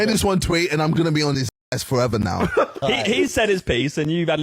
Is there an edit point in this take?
yes; 1 cut; at 2.8 s

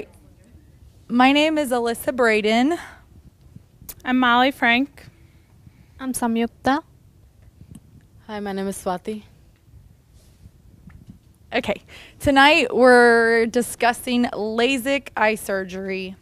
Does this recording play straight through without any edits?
yes; 0 cuts

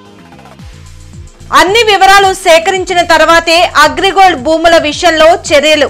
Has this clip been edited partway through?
yes; 1 cut; at 1.3 s

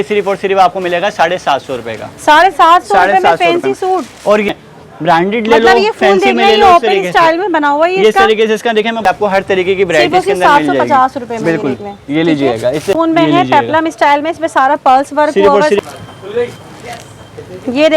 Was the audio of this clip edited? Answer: yes; 4 cuts; at 4.5 s, 9.0 s, 12.9 s, 15.8 s

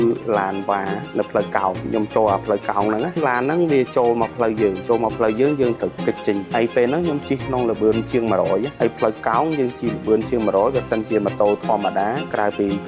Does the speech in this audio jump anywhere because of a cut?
yes; 3 cuts; at 1.8 s, 3.2 s, 5.8 s

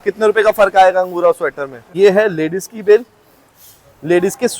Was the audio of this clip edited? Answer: yes; 1 cut; at 1.8 s

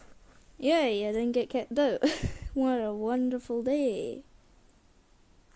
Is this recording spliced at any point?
yes; 1 cut; at 2.9 s

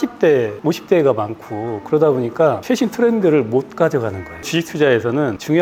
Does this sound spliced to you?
no; 0 cuts

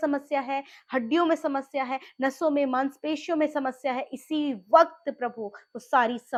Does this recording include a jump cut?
no; 0 cuts

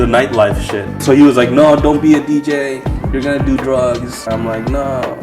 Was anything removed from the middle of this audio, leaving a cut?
yes; 2 cuts; at 1.0 s, 4.3 s

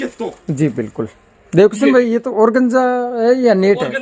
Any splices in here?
no; 0 cuts

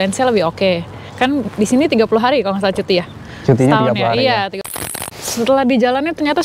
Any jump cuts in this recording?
yes; 1 cut; at 4.8 s

